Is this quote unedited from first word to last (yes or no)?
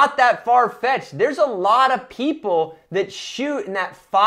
yes